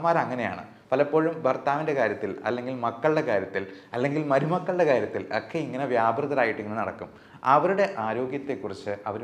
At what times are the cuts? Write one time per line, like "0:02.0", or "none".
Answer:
none